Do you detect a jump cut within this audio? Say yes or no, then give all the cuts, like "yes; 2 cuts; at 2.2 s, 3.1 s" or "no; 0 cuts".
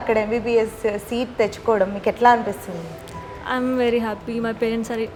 no; 0 cuts